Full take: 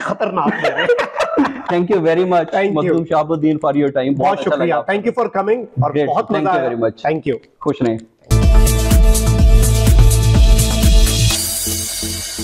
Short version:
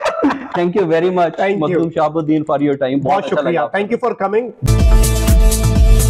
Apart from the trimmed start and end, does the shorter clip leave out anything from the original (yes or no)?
yes